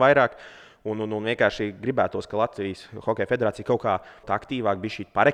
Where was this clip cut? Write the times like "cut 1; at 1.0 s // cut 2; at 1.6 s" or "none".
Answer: cut 1; at 4.2 s